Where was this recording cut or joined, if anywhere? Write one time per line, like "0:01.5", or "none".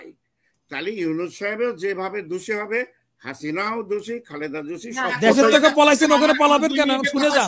0:05.1